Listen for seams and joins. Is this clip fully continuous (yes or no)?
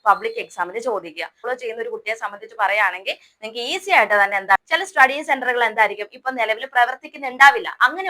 no